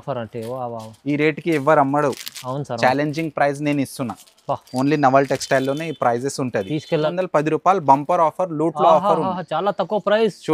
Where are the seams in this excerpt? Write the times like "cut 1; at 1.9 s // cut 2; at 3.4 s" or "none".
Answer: cut 1; at 7.1 s